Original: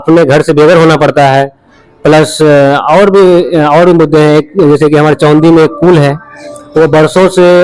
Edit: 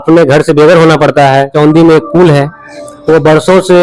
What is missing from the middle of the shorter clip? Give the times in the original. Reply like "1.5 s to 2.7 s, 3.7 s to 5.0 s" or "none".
1.5 s to 5.2 s

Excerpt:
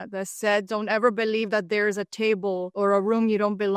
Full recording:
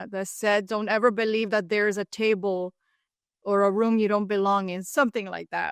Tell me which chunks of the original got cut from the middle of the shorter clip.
2.7 s to 3.4 s

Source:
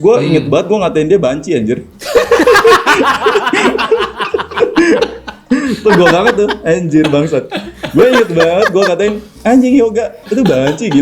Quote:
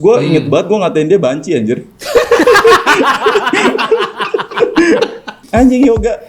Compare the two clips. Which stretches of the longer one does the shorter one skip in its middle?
5.3 s to 9.2 s

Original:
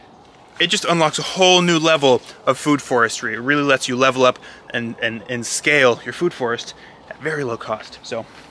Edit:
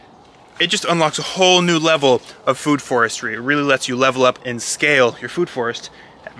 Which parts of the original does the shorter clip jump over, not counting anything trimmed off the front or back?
4.5 s to 5.4 s

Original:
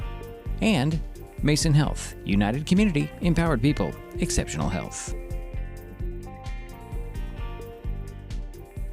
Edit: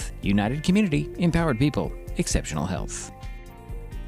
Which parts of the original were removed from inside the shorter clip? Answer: 4.9 s to 6.1 s

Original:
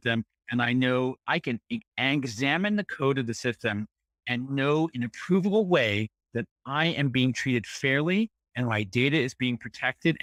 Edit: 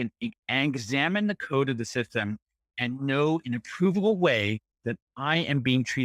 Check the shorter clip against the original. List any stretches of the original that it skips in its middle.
none

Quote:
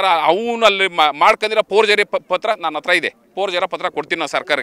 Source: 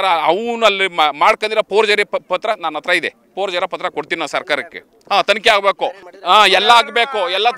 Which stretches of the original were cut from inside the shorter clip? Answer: none

